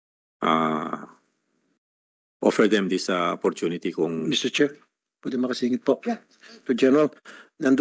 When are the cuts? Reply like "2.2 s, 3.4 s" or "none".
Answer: 6.7 s